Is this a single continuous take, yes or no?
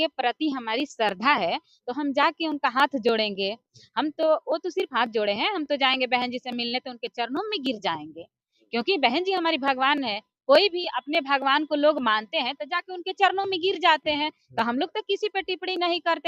yes